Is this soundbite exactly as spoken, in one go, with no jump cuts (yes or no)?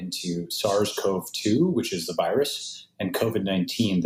yes